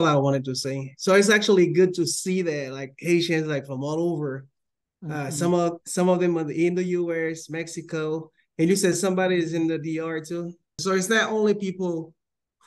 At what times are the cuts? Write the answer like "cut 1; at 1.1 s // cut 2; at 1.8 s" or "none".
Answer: cut 1; at 10.8 s